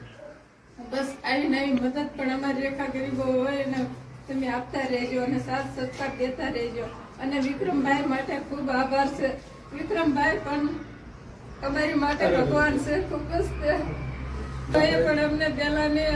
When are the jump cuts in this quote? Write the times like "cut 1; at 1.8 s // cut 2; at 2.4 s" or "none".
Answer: cut 1; at 14.7 s